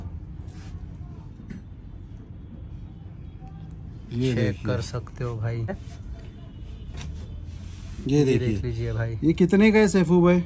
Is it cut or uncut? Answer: cut